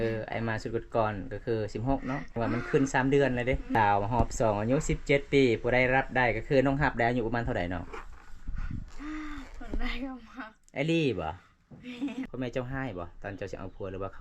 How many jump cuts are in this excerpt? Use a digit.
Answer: 3